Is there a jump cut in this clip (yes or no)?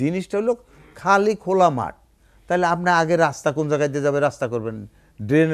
no